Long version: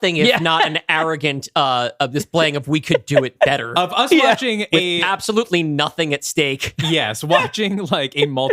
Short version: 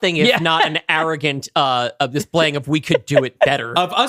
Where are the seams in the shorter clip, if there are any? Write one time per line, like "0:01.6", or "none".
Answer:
none

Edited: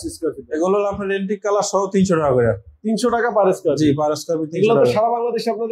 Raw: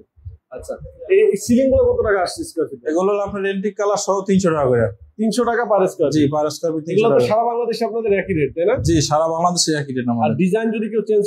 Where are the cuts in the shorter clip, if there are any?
none

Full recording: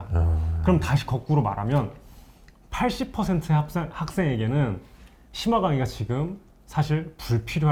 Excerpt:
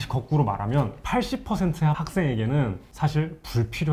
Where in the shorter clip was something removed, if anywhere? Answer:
0:01.0
0:02.0
0:02.8

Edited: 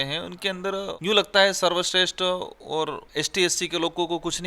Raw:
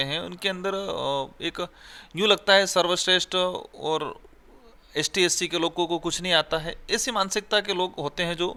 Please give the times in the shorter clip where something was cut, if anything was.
0:00.9
0:03.0

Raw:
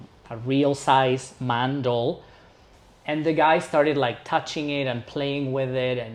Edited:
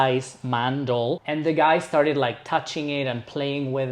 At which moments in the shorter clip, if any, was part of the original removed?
0:01.2

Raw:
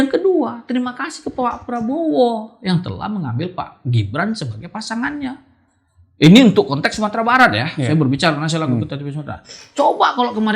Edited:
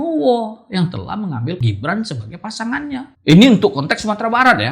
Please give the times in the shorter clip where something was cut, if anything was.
0:01.6
0:03.1

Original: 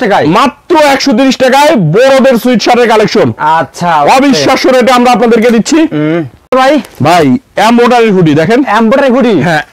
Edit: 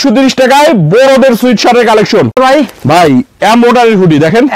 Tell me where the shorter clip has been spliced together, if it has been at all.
0:02.3

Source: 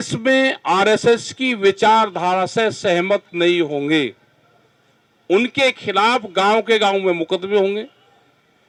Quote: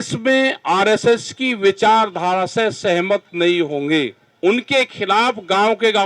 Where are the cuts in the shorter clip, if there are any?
0:04.2

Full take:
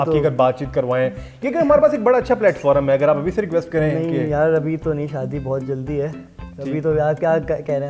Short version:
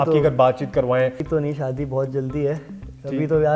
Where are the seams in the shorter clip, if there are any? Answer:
0:01.2

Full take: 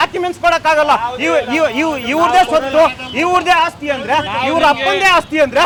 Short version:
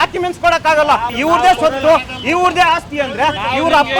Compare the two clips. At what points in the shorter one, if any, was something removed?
0:01.1

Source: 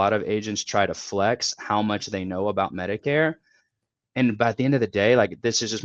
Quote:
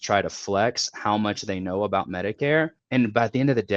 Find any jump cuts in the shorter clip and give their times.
0:02.8

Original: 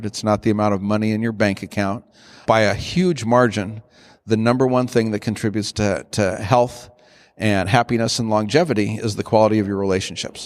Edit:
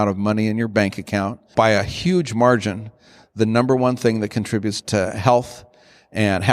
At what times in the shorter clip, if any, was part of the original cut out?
0:01.4
0:04.8

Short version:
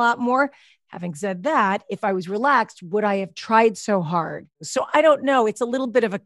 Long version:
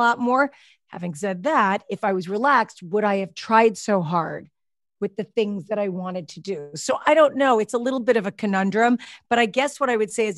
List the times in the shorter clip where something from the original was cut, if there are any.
0:04.5

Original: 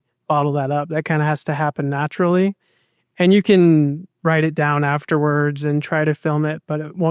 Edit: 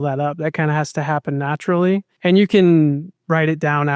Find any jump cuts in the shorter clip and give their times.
0:02.1

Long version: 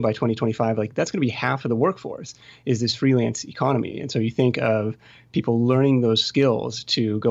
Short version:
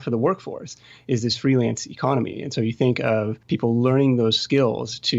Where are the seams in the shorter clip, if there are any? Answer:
0:03.4

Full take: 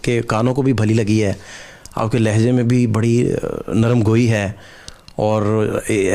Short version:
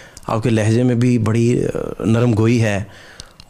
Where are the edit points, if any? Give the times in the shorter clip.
none

